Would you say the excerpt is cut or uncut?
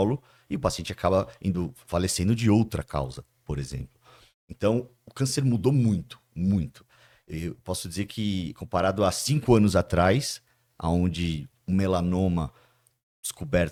uncut